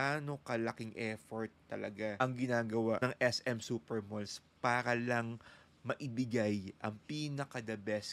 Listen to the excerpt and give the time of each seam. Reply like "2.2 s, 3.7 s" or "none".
2.2 s, 3.0 s

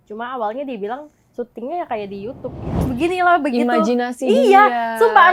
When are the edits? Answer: 2.9 s

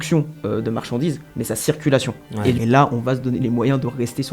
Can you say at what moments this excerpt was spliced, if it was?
2.6 s

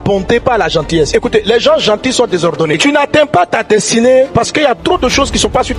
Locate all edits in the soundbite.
2.8 s

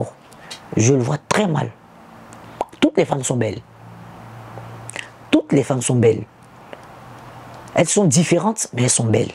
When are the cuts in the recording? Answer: none

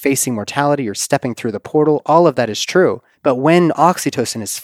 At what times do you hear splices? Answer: 3.1 s

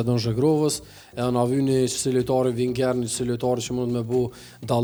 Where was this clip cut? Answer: none

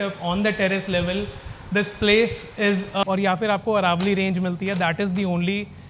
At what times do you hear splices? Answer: 3.0 s

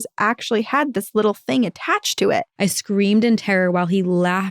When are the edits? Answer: 2.5 s

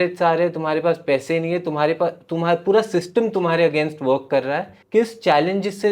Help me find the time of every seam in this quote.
4.7 s

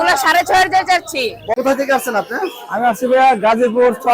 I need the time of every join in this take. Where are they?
1.5 s

